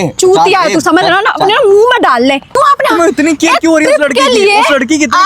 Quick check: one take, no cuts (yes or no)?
no